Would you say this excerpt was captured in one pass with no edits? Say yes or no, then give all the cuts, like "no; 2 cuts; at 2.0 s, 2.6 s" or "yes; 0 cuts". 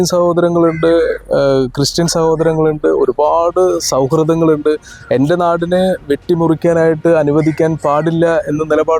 yes; 0 cuts